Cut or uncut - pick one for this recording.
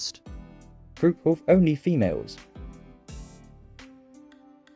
uncut